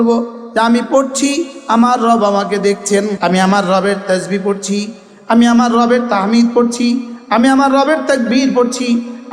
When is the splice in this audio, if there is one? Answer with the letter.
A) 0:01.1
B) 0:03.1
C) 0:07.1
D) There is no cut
B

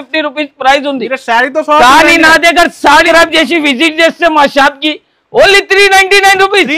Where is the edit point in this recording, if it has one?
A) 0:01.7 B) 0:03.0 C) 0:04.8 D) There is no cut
B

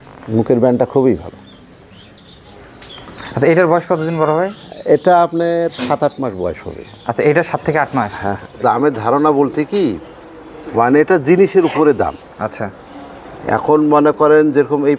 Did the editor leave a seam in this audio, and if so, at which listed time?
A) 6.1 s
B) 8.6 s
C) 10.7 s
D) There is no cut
B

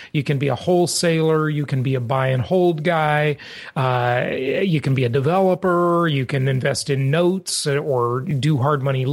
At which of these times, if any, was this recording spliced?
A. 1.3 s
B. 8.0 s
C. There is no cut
C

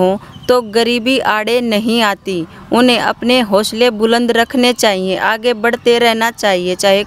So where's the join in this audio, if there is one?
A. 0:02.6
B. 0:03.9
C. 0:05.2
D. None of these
D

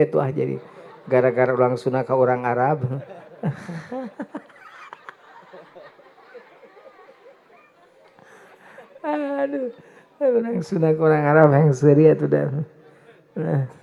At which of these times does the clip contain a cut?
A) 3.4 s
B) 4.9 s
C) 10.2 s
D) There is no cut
D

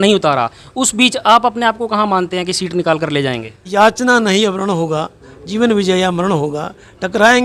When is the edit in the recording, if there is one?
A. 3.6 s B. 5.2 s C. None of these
A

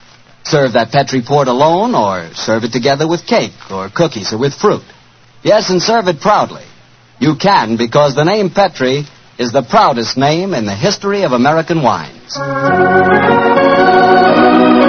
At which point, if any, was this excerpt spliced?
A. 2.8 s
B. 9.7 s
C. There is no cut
C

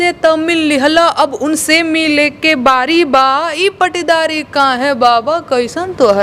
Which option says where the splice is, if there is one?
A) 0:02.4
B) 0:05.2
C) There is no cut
C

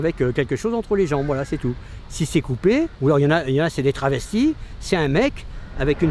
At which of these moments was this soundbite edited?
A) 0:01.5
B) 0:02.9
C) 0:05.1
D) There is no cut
B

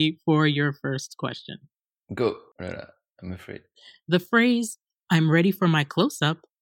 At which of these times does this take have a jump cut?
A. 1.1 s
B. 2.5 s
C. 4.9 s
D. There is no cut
B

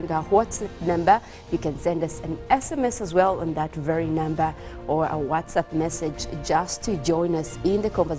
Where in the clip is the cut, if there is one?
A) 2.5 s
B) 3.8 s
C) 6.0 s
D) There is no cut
C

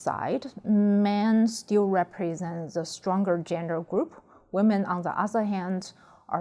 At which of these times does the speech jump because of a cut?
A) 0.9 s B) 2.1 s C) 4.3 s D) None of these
D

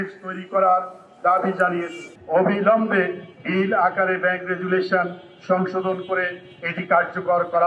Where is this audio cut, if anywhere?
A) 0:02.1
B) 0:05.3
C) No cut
A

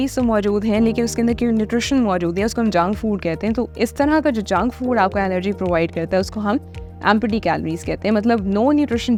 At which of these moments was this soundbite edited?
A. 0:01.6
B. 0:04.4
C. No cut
C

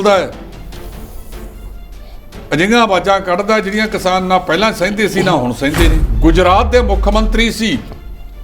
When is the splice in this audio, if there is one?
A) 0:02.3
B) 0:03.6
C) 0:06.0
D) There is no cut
C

